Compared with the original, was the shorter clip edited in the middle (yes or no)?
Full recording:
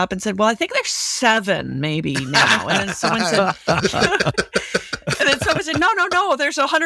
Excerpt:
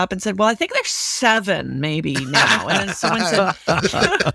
no